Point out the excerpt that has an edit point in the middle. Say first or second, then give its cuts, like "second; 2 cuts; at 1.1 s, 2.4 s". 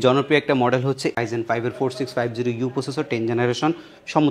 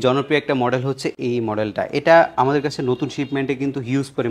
first; 1 cut; at 1.2 s